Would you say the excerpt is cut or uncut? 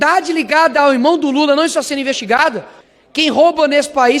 cut